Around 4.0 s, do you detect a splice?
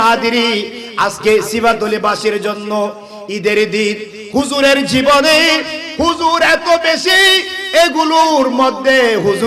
no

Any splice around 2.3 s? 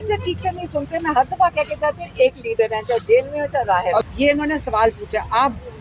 no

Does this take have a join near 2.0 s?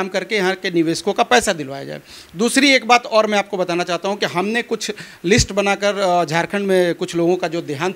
no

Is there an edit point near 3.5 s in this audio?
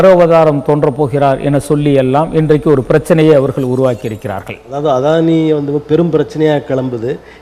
no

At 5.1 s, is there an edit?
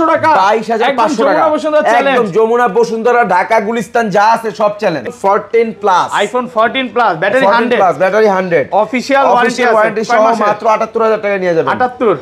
yes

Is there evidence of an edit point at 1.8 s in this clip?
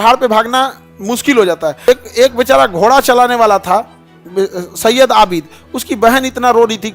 yes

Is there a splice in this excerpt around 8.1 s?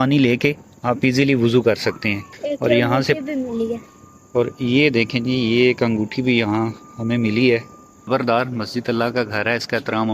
yes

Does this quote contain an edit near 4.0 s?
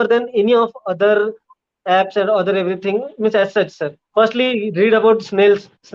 yes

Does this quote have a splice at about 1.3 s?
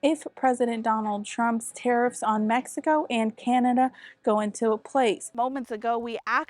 no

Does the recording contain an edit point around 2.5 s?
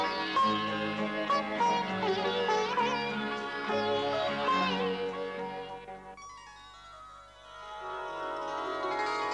no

